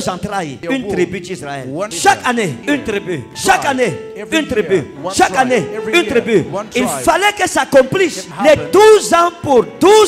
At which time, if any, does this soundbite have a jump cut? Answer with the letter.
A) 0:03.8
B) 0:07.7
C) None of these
C